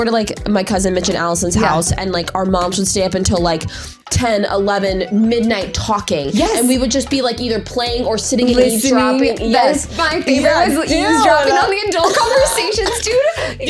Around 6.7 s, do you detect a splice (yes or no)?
no